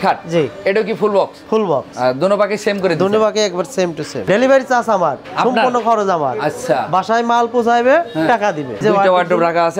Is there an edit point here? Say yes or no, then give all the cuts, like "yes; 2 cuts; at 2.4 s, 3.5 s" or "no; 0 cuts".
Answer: yes; 2 cuts; at 4.2 s, 8.8 s